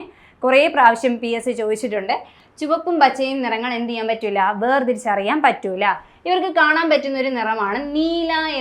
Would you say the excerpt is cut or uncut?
cut